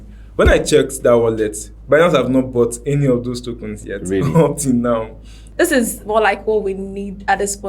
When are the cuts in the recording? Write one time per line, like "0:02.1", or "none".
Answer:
0:05.4